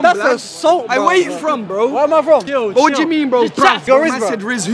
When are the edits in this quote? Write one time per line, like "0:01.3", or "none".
0:02.4
0:03.8